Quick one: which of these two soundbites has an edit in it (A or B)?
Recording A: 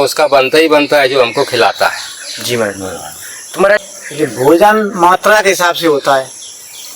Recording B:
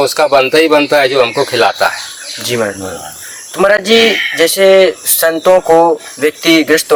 A